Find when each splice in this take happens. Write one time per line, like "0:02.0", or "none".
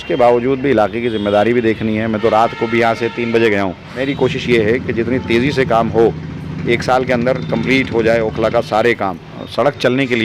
0:04.1
0:09.3

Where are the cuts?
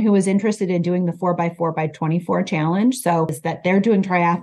0:03.4

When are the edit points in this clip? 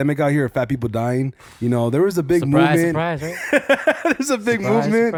none

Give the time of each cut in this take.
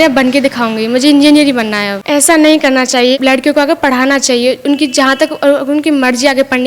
0:01.9
0:03.1

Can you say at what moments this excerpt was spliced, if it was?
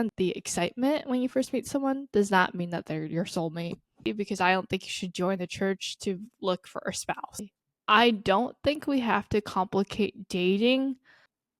0:04.1
0:07.4

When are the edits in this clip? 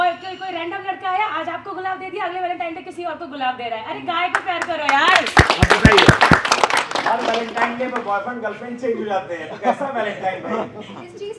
none

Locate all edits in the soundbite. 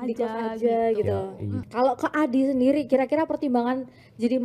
0:01.6

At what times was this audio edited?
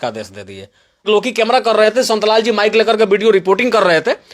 0:01.1

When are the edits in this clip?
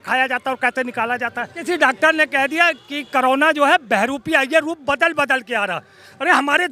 0:01.5

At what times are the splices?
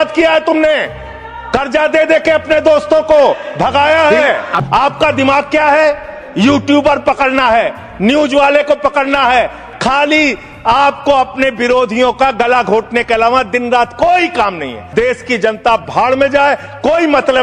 0:04.5
0:09.7
0:14.8

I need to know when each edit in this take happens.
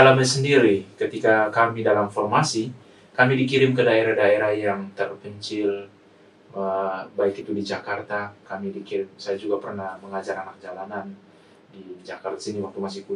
none

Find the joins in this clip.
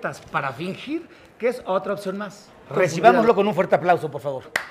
0:02.8

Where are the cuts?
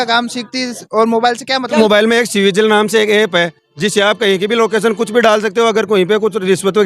0:01.8

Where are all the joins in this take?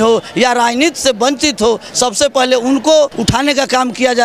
0:03.2

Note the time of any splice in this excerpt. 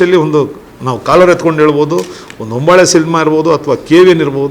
none

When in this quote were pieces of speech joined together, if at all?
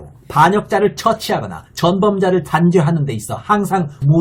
none

